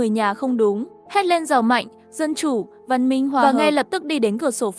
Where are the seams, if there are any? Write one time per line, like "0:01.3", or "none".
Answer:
0:00.9
0:03.5

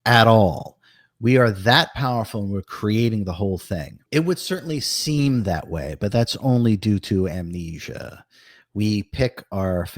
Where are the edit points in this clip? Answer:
0:04.0

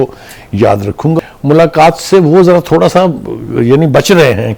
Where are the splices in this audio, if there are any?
0:01.2

